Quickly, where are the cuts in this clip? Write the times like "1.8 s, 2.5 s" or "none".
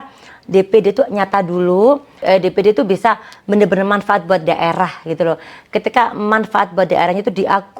2.2 s